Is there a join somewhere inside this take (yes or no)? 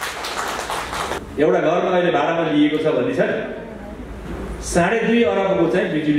yes